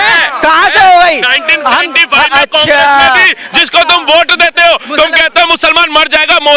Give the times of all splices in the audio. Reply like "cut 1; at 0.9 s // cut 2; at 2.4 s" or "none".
none